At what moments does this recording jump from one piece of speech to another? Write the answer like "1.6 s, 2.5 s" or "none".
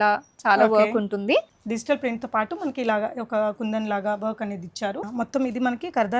1.5 s, 5.1 s